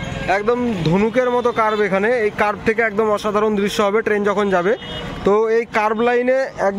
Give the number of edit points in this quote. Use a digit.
0